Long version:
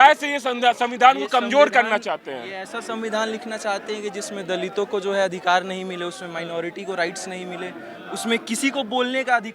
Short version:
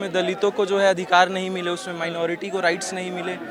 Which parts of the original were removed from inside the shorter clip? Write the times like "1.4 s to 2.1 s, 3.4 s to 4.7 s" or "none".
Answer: none

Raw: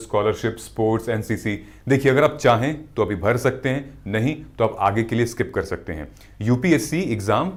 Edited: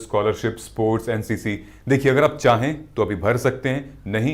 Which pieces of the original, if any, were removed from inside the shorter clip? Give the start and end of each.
none

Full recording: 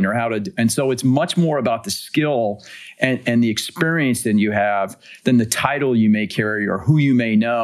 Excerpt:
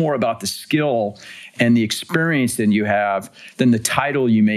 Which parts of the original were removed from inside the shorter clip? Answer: 3.0 s to 3.2 s

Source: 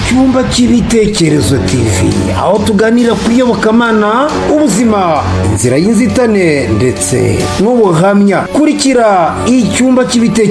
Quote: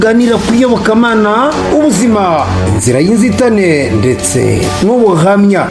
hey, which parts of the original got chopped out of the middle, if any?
none

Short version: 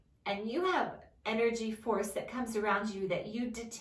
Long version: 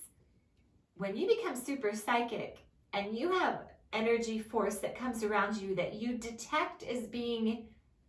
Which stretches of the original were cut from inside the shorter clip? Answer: none

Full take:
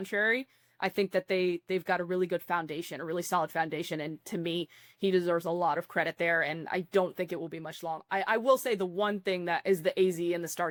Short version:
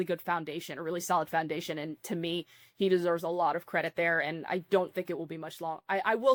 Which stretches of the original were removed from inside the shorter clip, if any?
none

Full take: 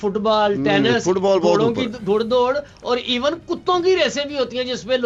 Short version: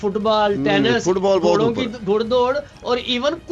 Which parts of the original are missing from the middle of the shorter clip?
none

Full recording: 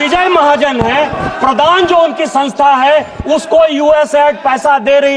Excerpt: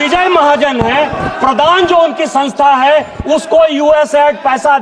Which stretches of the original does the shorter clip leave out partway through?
none

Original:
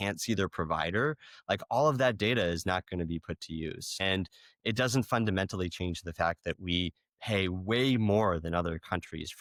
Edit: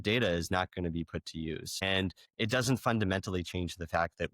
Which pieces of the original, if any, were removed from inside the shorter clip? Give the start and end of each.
4.4 s to 4.5 s

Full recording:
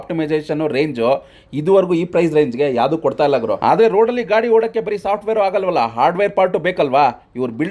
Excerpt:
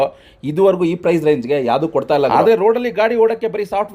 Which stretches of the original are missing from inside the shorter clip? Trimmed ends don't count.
3.4 s to 3.6 s

